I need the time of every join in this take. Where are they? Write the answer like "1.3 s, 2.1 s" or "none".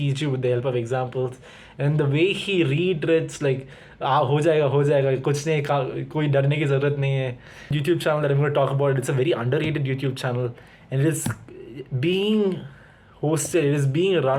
7.8 s